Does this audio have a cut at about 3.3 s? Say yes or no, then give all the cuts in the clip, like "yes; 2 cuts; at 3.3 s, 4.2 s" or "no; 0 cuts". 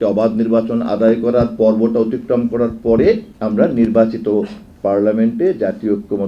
yes; 1 cut; at 3.3 s